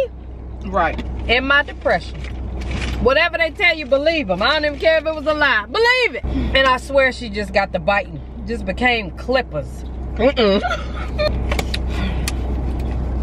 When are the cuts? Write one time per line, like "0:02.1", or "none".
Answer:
0:06.2
0:11.3

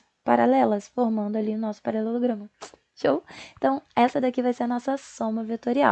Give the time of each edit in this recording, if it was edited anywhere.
none

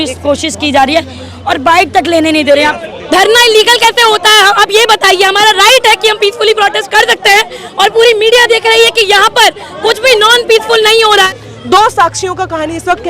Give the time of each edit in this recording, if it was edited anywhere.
0:02.9
0:11.3

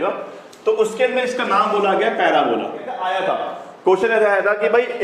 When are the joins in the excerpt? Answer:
0:03.0

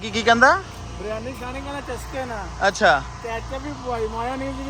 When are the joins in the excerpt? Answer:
none

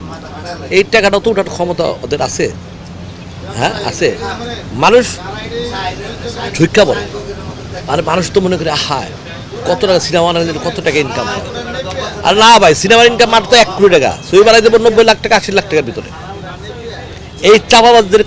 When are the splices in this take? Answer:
none

